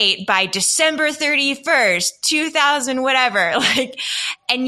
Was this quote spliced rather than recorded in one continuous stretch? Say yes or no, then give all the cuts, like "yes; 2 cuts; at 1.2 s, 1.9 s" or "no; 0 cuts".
no; 0 cuts